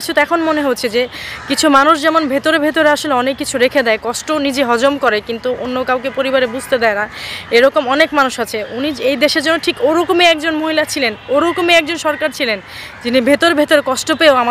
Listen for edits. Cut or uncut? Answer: uncut